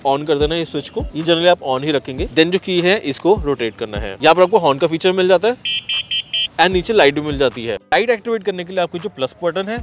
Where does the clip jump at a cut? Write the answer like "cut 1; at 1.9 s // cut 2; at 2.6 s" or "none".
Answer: none